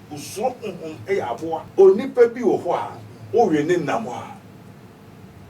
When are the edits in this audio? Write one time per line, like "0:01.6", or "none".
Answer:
0:01.7